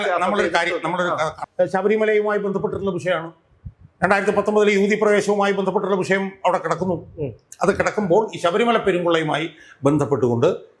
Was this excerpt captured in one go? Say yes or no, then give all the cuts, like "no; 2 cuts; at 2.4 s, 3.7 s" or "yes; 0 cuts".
no; 1 cut; at 1.4 s